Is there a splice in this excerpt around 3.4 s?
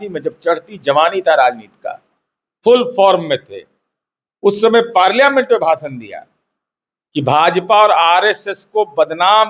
no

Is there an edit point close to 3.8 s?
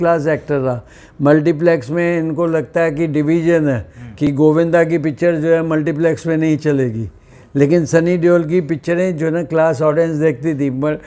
no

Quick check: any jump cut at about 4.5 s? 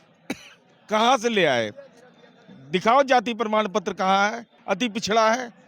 yes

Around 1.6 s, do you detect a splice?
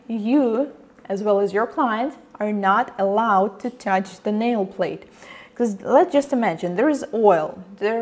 yes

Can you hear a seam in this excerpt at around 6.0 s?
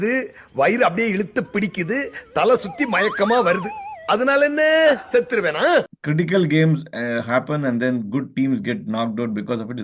yes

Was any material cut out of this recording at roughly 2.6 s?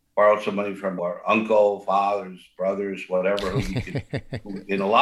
no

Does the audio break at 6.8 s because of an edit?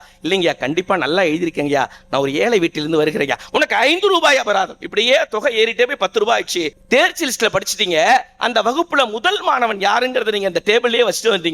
yes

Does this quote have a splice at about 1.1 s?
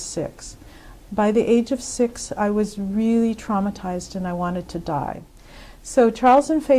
no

